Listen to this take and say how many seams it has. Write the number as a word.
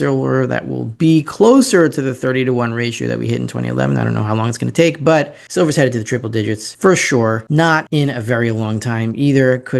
three